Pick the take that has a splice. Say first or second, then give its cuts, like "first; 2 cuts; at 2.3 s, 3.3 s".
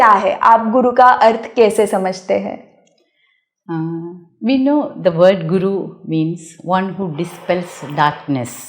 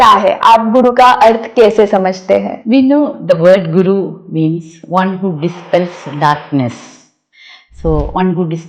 second; 1 cut; at 2.5 s